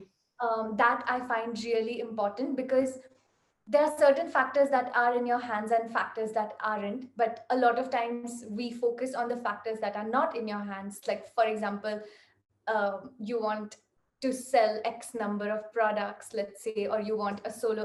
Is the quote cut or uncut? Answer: uncut